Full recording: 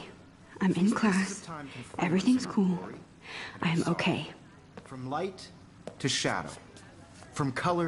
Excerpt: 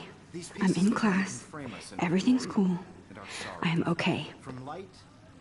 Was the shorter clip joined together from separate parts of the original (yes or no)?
yes